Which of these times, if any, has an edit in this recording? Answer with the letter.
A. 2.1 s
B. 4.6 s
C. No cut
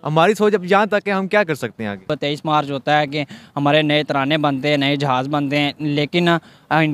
A